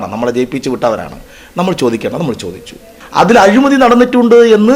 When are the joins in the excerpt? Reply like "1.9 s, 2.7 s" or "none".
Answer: 2.9 s